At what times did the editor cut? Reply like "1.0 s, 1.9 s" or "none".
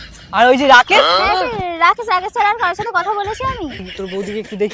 3.7 s